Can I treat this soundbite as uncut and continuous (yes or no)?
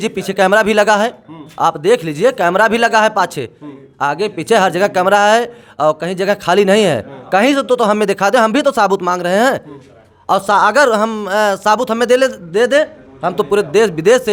yes